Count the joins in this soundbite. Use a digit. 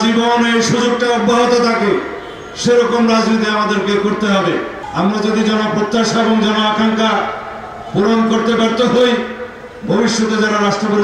1